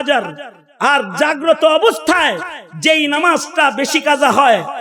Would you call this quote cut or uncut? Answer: uncut